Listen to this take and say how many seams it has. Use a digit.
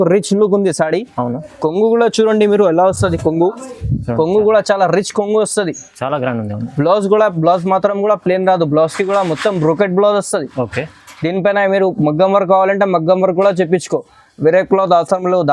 0